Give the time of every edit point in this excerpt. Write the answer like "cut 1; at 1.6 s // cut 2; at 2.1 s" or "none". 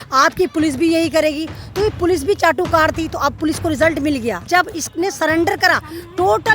cut 1; at 4.4 s